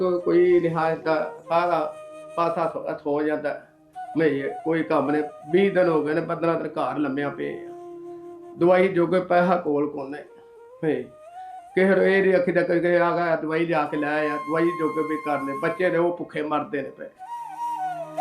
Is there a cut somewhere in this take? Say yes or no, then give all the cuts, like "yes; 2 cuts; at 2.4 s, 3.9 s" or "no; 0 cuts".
no; 0 cuts